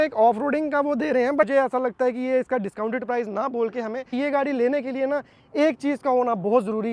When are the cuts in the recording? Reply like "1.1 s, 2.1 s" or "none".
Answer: 1.5 s, 4.1 s